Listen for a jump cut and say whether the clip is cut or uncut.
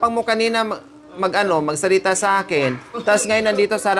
uncut